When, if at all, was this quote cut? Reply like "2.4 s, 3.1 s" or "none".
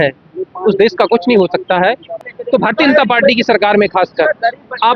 2.3 s